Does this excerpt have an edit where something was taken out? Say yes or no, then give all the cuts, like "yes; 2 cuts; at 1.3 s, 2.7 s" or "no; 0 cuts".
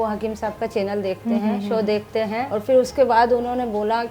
yes; 1 cut; at 2.5 s